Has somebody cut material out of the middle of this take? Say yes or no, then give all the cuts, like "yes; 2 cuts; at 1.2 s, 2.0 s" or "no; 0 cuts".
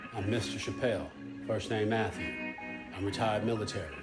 no; 0 cuts